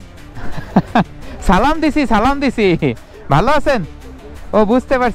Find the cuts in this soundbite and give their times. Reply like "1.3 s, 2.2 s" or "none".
none